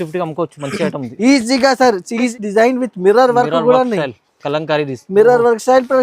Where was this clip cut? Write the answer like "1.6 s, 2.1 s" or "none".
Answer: 2.3 s